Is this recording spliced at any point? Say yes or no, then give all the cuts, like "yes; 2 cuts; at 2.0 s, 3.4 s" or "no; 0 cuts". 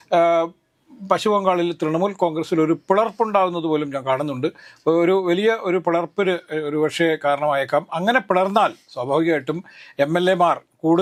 no; 0 cuts